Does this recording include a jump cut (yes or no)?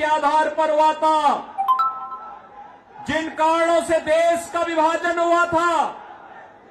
yes